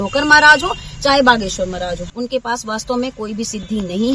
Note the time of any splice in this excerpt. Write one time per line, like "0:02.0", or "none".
0:02.0